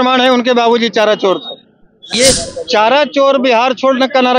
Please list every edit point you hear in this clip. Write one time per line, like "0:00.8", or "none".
0:02.1